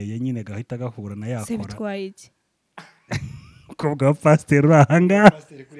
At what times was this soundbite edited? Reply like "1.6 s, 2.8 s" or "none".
none